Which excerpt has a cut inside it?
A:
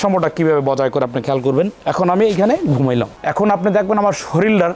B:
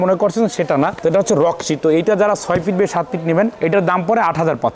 B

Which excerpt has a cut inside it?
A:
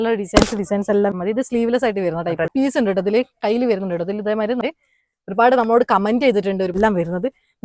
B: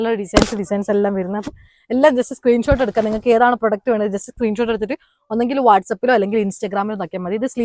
A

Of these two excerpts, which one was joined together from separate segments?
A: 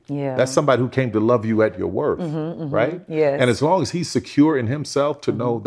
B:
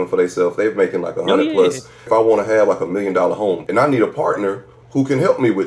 B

